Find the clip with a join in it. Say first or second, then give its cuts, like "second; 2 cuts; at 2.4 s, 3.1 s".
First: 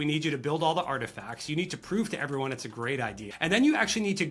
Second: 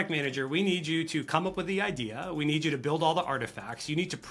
first; 1 cut; at 3.3 s